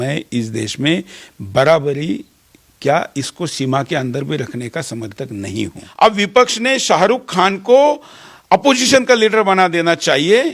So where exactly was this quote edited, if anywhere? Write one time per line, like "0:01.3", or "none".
0:05.8